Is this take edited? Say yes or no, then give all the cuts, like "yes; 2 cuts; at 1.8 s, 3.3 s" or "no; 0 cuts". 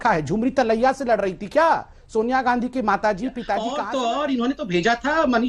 yes; 1 cut; at 3.8 s